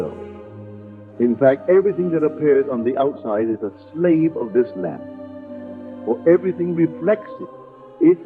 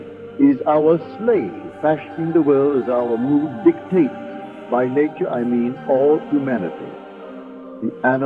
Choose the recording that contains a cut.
first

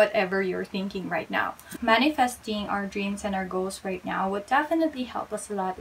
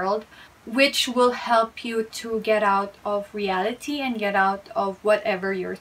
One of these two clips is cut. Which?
first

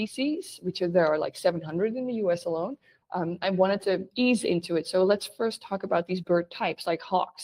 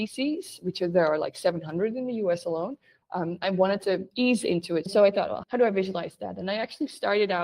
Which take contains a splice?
second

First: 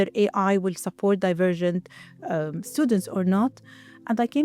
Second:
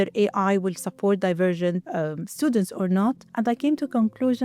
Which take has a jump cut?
second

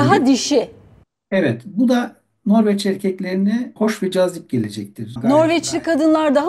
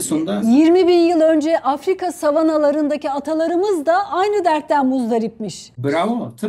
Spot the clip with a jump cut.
first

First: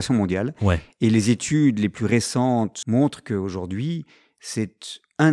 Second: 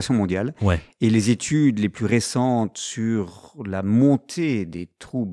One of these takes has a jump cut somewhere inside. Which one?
first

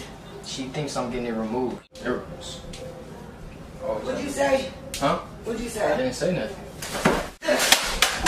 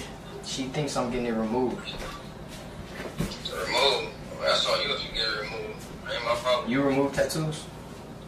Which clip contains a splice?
first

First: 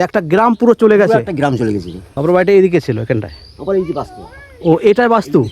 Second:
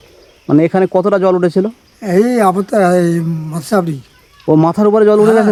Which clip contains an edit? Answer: first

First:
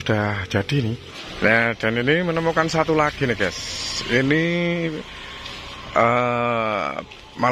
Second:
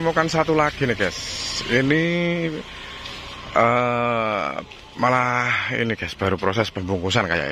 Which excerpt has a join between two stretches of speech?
first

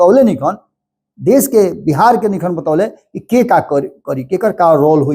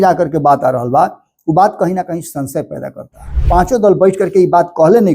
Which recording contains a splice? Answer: second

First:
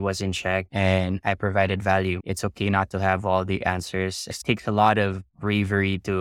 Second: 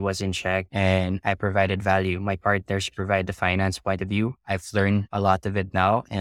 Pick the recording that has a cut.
first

